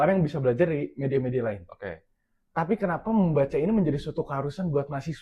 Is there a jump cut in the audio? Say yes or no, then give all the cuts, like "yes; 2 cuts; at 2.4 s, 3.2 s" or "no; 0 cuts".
no; 0 cuts